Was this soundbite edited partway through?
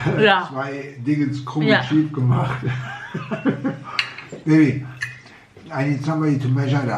no; 0 cuts

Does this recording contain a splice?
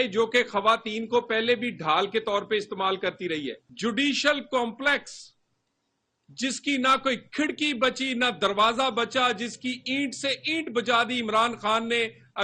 yes; 1 cut; at 3.6 s

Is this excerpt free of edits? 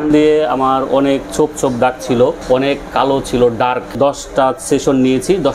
no; 2 cuts; at 2.4 s, 3.9 s

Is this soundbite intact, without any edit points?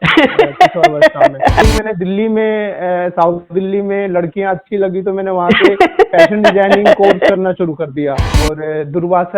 no; 2 cuts; at 1.6 s, 8.3 s

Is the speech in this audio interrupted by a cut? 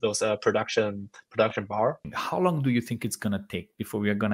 yes; 1 cut; at 2.1 s

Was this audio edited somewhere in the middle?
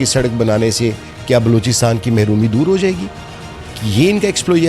no; 0 cuts

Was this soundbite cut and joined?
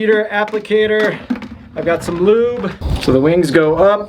yes; 1 cut; at 2.8 s

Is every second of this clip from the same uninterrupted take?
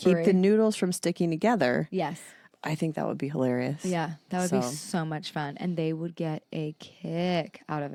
yes; 0 cuts

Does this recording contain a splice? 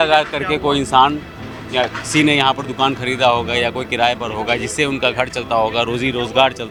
no; 0 cuts

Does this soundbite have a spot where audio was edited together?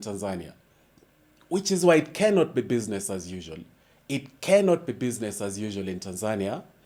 no; 0 cuts

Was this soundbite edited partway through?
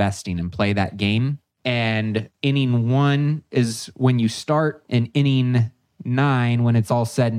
yes; 3 cuts; at 1.5 s, 2.3 s, 4.8 s

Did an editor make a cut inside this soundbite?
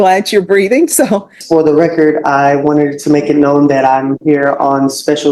yes; 1 cut; at 1.4 s

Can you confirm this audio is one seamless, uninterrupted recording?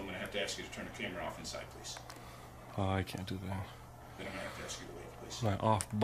yes; 0 cuts

